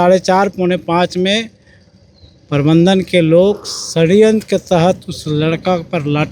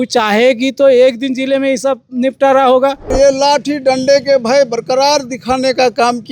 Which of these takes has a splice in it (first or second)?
second